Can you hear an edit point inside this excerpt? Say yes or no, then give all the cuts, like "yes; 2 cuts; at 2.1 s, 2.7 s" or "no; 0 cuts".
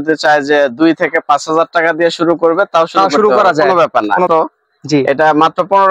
yes; 1 cut; at 4.3 s